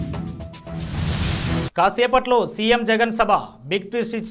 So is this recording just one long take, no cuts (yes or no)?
no